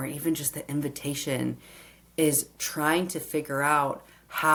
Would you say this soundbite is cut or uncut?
uncut